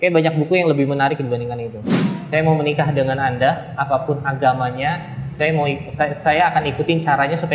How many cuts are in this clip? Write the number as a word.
one